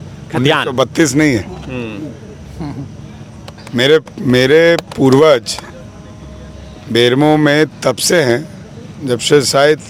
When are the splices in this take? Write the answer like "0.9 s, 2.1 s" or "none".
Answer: none